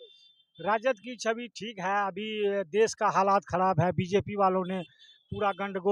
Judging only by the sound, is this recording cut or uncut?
uncut